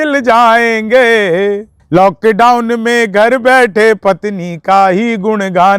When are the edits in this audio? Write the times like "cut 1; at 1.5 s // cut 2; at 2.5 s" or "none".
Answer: cut 1; at 1.7 s

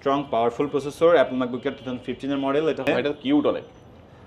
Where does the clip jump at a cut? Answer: cut 1; at 2.8 s

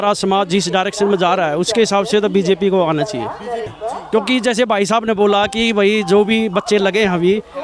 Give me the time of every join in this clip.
cut 1; at 3.8 s

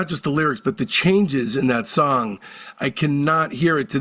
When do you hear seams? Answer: none

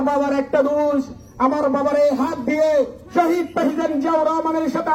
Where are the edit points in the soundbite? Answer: none

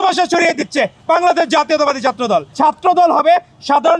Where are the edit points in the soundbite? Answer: cut 1; at 2.5 s

